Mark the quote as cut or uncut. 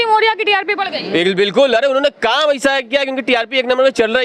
uncut